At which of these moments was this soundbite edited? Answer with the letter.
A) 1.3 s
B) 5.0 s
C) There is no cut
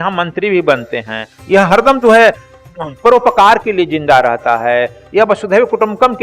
A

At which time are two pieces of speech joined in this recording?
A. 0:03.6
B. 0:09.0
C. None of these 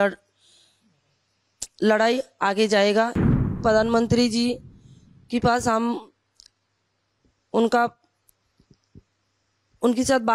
A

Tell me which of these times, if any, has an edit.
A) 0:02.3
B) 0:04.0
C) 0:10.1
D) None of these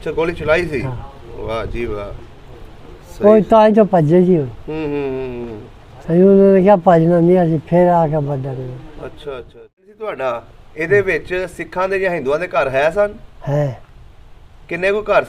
C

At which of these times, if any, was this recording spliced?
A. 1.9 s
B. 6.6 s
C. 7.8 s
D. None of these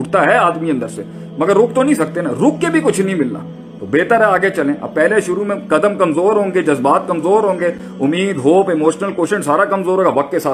D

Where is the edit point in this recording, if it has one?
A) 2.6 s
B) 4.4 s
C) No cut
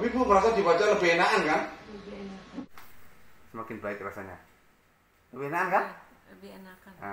A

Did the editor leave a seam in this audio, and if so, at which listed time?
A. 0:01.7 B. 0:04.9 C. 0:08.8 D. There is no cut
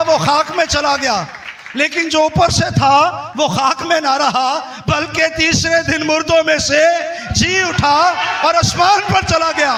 D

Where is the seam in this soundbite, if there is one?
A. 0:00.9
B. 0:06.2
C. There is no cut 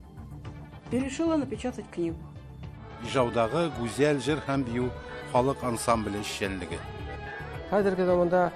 A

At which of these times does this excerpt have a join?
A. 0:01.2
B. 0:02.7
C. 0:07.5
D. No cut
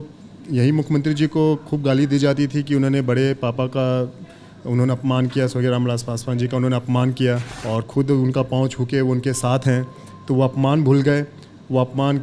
C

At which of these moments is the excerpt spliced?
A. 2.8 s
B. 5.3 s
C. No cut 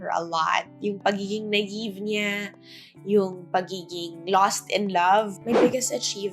B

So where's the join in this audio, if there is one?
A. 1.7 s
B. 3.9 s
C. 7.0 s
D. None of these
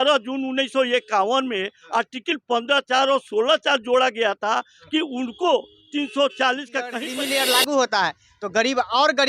C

